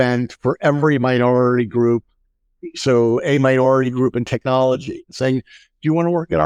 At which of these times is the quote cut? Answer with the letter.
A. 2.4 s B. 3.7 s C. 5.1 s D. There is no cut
C